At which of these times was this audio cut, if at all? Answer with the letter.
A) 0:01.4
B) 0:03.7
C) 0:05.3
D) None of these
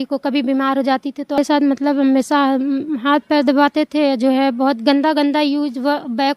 A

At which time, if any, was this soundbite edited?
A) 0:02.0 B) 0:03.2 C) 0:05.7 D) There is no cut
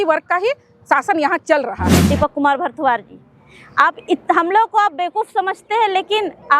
A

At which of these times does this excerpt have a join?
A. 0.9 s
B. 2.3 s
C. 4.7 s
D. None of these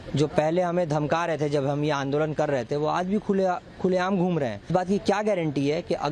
C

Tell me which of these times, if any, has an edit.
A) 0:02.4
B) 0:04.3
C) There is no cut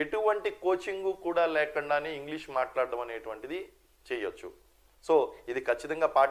C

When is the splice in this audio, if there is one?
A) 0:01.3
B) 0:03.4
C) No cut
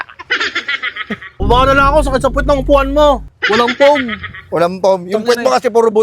A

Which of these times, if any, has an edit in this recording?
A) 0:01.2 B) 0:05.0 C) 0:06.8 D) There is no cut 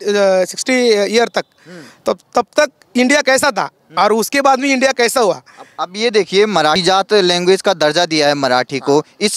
C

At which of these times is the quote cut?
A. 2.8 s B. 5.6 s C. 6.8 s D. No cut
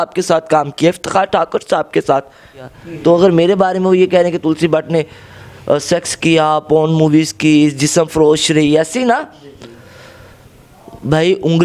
A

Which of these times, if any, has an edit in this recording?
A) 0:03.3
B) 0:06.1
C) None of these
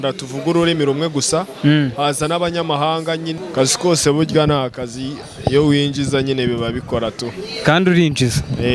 A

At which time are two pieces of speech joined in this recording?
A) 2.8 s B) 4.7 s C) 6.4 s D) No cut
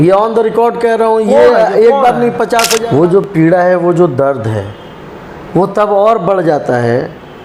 A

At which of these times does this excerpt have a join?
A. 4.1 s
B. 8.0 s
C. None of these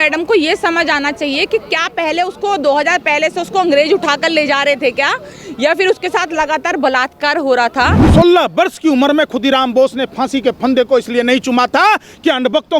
B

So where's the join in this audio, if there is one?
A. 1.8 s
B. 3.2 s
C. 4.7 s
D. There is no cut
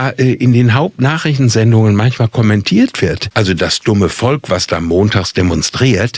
B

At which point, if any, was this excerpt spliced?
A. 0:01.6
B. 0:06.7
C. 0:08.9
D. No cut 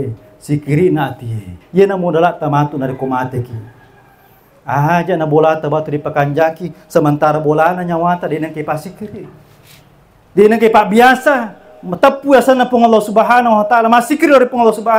A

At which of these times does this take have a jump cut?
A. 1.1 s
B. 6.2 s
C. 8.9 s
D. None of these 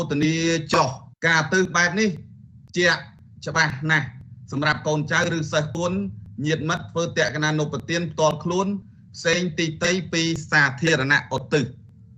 A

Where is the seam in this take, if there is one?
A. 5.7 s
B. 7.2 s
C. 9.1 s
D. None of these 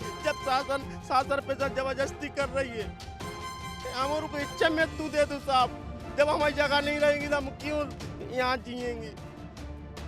C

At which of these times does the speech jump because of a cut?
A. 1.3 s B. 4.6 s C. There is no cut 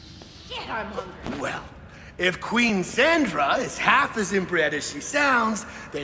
A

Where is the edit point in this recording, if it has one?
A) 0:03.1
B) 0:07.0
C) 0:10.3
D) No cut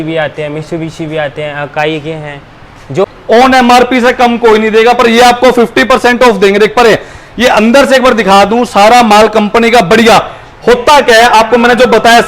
A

